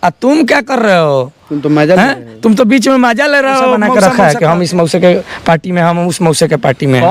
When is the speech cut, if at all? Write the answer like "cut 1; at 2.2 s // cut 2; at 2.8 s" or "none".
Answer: cut 1; at 3.9 s